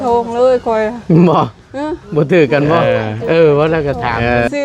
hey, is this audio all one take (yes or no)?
no